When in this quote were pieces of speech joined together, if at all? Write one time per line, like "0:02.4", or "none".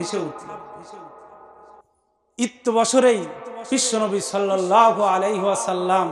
0:01.8